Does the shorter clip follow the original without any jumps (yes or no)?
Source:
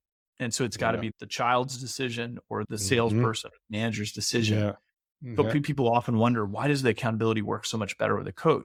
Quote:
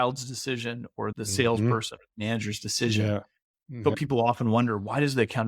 no